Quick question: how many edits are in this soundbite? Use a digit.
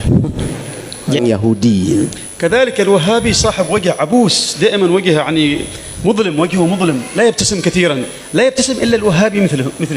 1